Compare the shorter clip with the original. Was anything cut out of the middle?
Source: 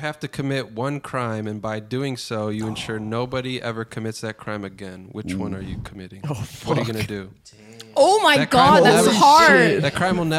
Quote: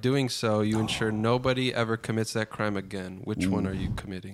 no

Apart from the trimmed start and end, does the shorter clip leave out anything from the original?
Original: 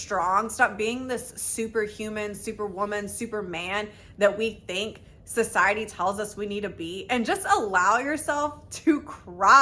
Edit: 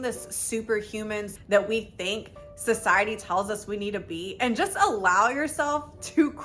yes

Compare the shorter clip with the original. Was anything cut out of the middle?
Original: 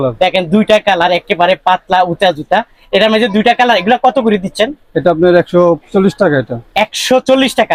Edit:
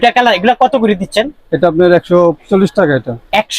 no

